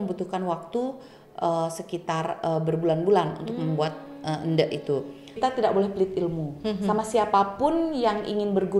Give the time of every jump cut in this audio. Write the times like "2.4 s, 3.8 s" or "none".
5.4 s